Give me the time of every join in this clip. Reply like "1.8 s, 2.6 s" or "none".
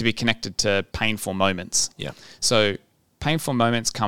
0.9 s